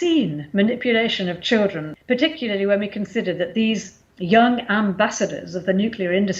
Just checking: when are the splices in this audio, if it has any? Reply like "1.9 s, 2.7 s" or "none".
1.9 s